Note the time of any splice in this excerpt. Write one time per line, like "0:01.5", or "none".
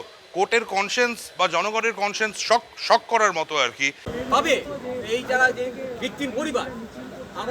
0:04.0

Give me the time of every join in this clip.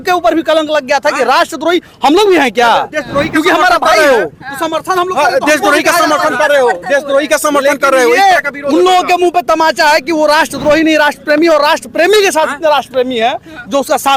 none

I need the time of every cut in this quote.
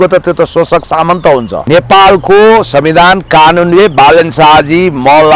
0:01.5

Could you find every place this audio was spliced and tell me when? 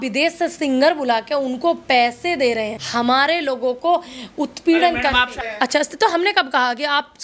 0:02.8
0:05.5

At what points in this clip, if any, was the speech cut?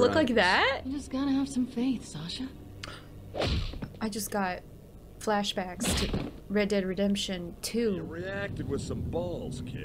0:00.9
0:08.2

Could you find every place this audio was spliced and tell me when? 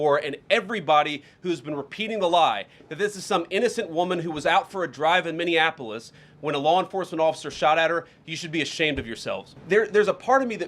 0:09.5

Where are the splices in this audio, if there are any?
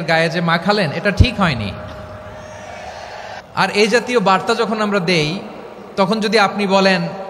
0:03.4

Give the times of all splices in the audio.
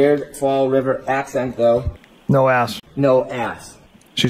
0:02.8

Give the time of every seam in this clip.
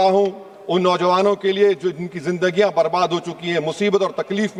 none

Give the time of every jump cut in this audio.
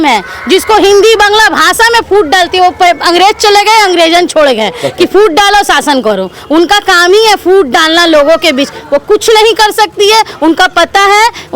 none

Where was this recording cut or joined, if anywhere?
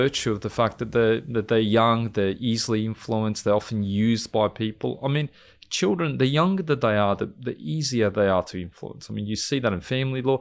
none

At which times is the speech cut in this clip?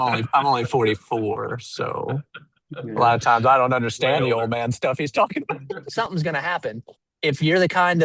0:05.8

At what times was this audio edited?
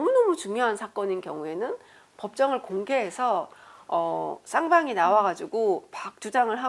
none

